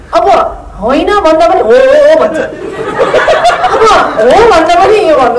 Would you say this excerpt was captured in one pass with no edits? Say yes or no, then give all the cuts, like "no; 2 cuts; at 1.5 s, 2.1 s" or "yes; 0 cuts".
yes; 0 cuts